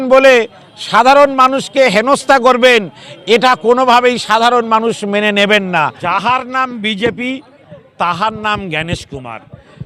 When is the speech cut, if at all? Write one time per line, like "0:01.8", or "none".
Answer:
0:06.0